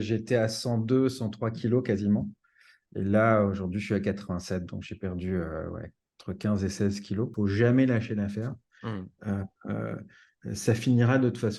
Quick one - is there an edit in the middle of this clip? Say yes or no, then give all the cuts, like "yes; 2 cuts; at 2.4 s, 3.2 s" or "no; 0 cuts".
yes; 1 cut; at 7.3 s